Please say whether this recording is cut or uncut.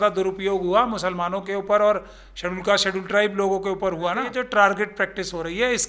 cut